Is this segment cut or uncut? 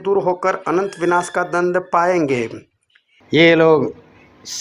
uncut